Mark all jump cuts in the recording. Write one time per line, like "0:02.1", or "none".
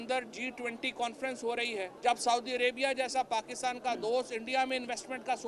0:01.9